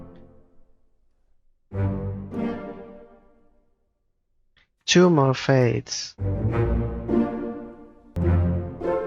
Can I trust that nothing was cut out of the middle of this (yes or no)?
no